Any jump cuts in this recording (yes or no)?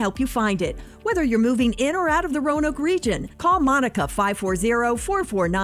no